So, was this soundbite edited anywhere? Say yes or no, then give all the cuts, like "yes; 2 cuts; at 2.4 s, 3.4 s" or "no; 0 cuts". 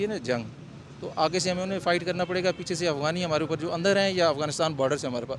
no; 0 cuts